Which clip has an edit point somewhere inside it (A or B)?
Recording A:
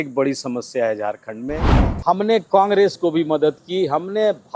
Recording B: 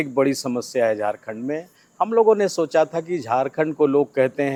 A